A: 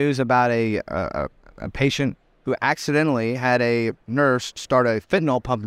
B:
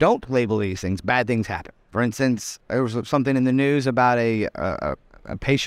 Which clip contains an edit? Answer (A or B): B